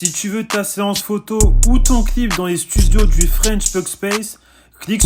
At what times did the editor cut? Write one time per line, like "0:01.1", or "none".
none